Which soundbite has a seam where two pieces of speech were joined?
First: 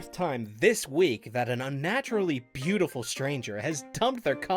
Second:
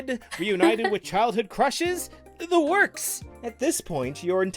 second; 1 cut; at 3.2 s

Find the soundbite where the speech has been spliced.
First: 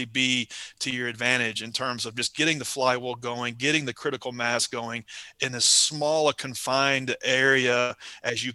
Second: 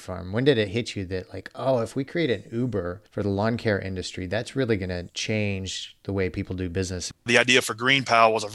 second; 3 cuts; at 3.0 s, 5.1 s, 7.3 s

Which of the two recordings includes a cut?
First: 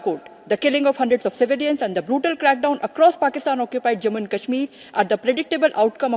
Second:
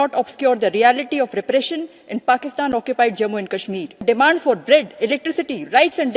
second; 1 cut; at 4.0 s

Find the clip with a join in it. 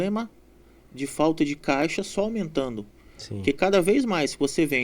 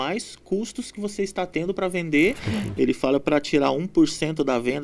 second; 1 cut; at 2.4 s

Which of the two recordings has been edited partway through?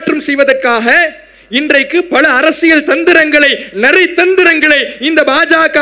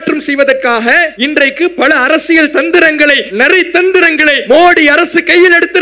second; 3 cuts; at 1.1 s, 3.3 s, 4.4 s

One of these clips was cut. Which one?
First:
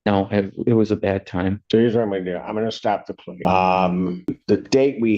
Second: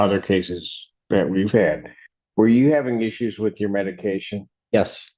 first; 3 cuts; at 1.6 s, 3.2 s, 4.4 s

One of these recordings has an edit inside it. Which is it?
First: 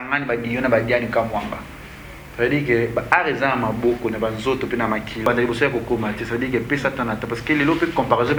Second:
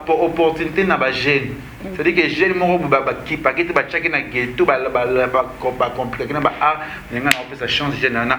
first; 1 cut; at 5.2 s

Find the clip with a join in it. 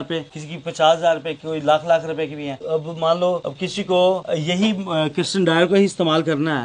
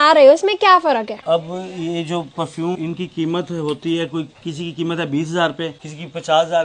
second; 2 cuts; at 1.2 s, 2.8 s

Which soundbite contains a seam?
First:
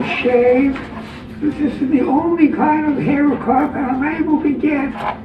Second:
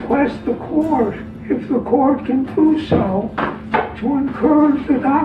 second; 1 cut; at 1.3 s

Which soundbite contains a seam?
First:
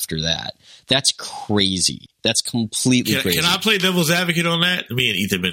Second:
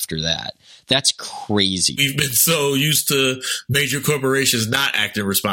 second; 1 cut; at 2.1 s

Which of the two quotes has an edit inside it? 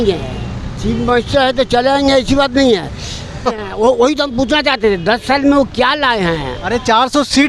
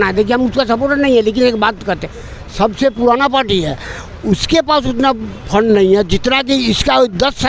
first; 1 cut; at 3.4 s

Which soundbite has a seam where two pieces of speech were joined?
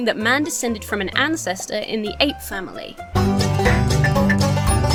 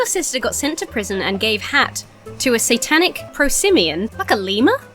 second; 2 cuts; at 3.2 s, 4.2 s

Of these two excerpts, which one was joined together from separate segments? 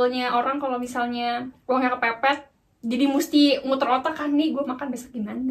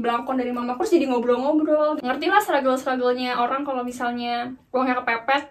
second; 1 cut; at 2.0 s

